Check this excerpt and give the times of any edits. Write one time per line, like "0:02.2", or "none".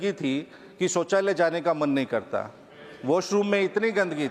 none